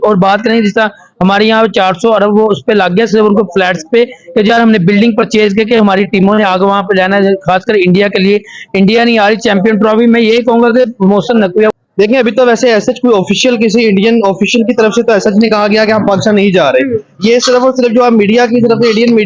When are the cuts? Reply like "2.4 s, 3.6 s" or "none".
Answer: 11.8 s